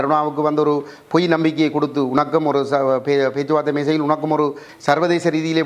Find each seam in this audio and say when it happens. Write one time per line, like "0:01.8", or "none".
0:04.6